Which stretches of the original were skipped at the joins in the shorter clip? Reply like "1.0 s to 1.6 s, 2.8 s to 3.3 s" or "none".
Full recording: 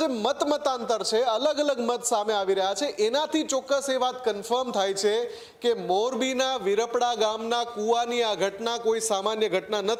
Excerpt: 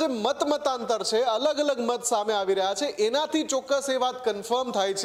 none